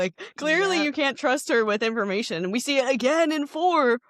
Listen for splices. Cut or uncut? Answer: uncut